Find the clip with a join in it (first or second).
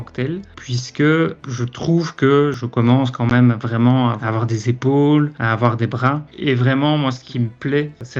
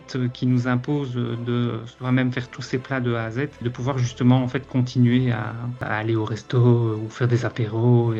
first